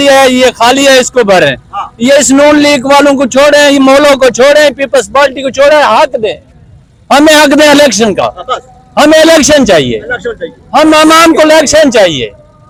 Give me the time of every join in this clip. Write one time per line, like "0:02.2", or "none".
none